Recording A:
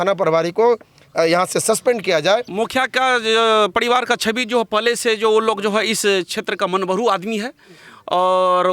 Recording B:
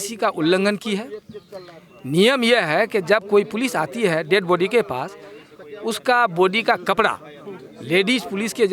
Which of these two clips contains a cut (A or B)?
A